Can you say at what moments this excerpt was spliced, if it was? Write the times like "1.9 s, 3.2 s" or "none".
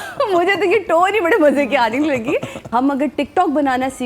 2.6 s